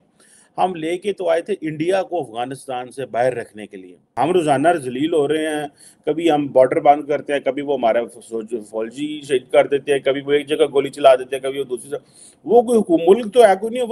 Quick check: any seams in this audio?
yes; 1 cut; at 4.1 s

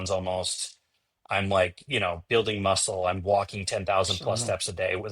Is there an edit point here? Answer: no; 0 cuts

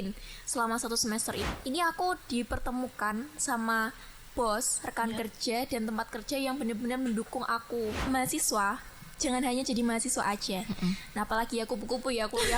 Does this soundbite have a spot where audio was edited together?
yes; 2 cuts; at 1.5 s, 8.0 s

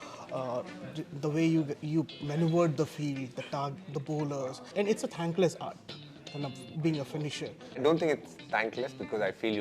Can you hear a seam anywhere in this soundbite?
yes; 2 cuts; at 4.7 s, 7.8 s

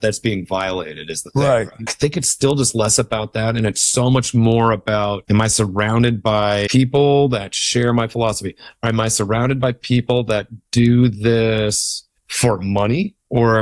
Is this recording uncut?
no; 3 cuts; at 1.8 s, 5.2 s, 6.7 s

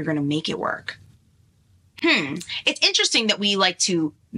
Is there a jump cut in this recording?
no; 0 cuts

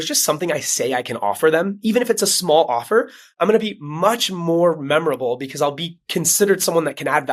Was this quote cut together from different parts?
no; 0 cuts

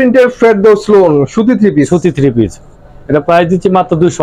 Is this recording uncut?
yes; 0 cuts

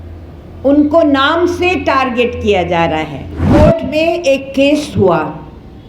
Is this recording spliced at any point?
yes; 1 cut; at 3.4 s

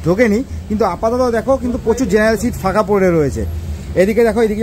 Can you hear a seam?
no; 0 cuts

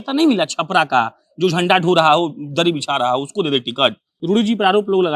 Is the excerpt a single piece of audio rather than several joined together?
no; 1 cut; at 4.1 s

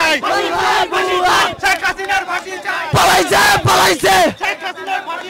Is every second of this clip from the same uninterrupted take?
yes; 0 cuts

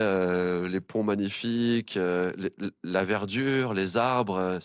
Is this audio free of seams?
yes; 0 cuts

